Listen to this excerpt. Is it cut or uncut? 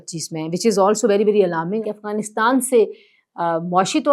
cut